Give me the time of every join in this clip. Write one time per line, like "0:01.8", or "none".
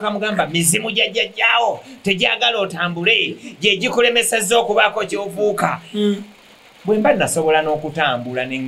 none